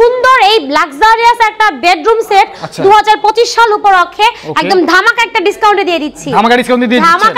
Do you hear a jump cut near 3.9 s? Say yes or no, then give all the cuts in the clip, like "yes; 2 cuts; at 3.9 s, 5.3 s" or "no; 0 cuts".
no; 0 cuts